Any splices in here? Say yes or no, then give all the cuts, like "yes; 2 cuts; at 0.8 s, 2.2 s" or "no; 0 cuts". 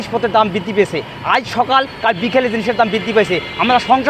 no; 0 cuts